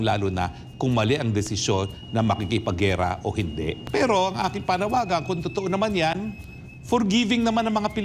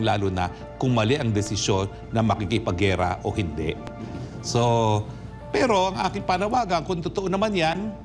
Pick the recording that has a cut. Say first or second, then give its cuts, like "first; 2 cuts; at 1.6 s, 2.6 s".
first; 1 cut; at 3.8 s